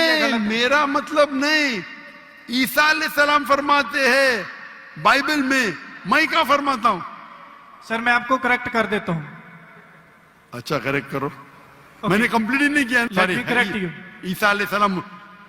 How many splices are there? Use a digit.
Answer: 1